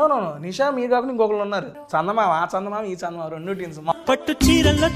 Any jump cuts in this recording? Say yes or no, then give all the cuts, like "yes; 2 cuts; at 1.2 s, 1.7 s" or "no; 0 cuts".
yes; 2 cuts; at 1.8 s, 3.9 s